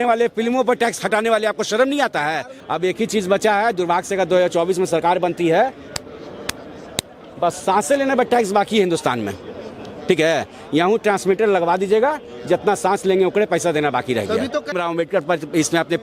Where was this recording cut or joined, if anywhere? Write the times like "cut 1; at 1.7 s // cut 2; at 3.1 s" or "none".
cut 1; at 2.5 s // cut 2; at 14.7 s